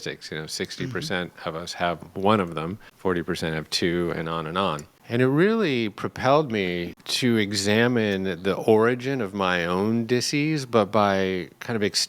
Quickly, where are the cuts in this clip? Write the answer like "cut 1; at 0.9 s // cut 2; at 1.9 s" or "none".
cut 1; at 2.8 s // cut 2; at 4.9 s // cut 3; at 7.0 s